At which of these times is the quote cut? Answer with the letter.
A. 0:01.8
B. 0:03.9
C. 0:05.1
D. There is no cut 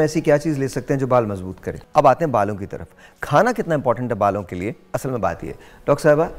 A